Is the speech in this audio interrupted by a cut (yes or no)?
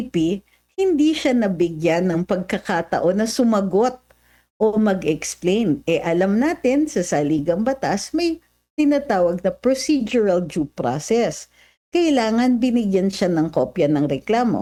no